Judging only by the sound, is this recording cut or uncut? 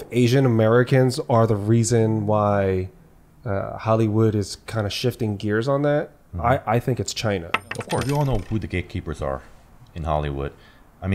cut